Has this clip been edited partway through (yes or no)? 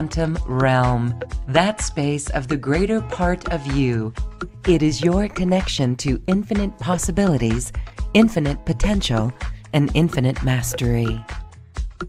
no